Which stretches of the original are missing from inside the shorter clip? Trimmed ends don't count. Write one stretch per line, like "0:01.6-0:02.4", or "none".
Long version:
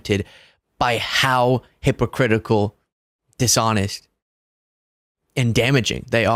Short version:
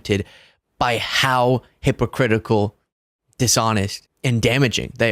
0:04.0-0:05.2